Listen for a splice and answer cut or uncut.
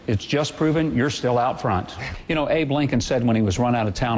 cut